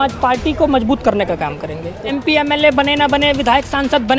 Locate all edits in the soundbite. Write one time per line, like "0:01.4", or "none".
0:02.1